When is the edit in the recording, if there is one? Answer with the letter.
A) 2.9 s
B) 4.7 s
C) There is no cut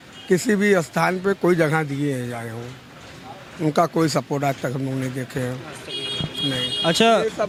C